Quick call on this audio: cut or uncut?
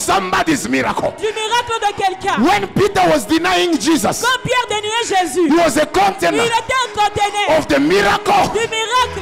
uncut